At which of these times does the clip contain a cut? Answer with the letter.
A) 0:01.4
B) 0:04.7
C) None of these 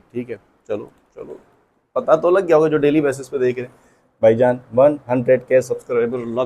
C